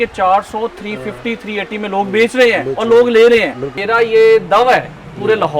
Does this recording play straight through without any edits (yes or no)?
no